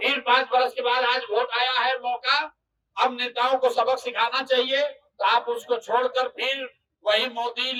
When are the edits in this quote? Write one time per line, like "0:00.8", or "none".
none